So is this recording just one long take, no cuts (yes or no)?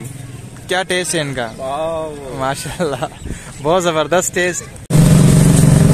no